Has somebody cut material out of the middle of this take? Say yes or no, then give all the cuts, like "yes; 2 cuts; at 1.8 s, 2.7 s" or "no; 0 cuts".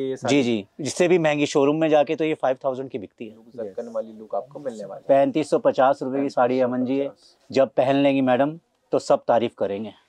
yes; 1 cut; at 3.6 s